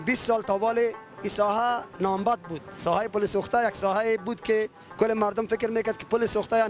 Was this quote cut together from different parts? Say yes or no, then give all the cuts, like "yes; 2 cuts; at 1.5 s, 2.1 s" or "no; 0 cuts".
no; 0 cuts